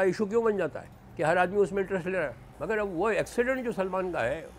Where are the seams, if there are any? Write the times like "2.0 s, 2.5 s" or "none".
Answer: 2.5 s